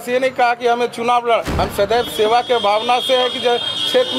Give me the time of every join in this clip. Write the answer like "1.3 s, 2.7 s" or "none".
1.5 s